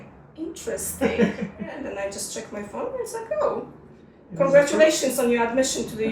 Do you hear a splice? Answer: yes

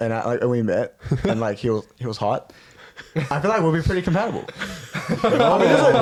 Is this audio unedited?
yes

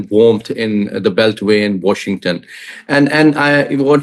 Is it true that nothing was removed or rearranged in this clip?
yes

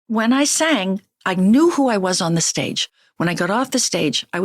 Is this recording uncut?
no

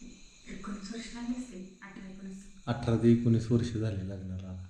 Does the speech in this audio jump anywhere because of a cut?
no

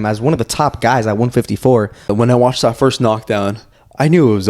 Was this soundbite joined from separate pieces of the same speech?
yes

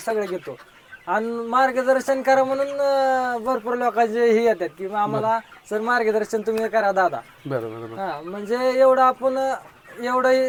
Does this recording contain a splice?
no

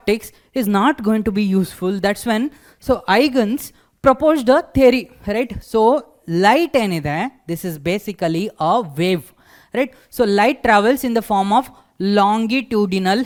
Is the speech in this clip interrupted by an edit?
no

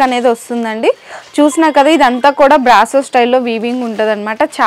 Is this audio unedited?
yes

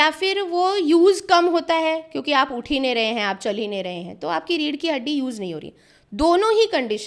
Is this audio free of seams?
yes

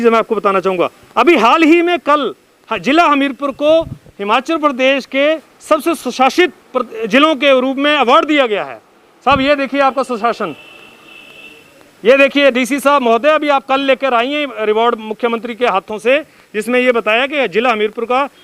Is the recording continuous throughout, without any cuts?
yes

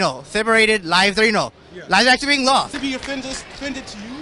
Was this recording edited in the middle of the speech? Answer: yes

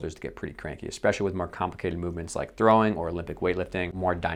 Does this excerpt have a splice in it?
no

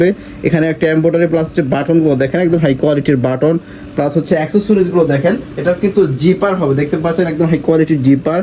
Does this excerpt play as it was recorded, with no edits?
no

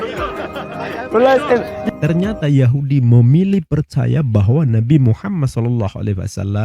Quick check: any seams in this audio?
yes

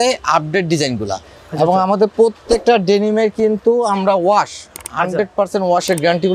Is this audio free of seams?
yes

